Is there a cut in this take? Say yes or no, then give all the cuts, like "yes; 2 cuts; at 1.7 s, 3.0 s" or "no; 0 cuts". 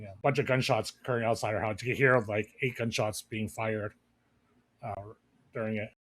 yes; 1 cut; at 4.9 s